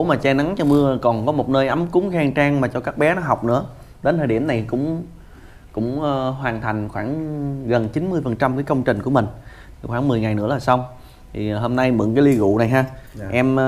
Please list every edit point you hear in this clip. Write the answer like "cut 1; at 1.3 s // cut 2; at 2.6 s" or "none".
none